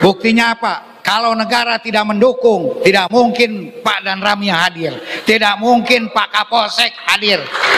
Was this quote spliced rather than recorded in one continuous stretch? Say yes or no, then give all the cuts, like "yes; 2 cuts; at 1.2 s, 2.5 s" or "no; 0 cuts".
yes; 2 cuts; at 0.9 s, 3.7 s